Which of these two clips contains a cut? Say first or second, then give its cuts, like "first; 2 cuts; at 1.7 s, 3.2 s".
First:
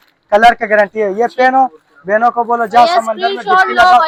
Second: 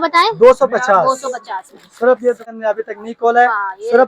second; 1 cut; at 2.5 s